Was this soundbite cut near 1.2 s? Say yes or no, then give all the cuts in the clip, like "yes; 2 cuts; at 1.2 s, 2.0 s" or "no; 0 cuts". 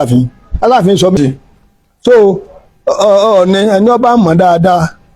yes; 1 cut; at 1.2 s